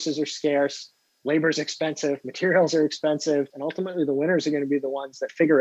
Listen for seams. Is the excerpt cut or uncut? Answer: cut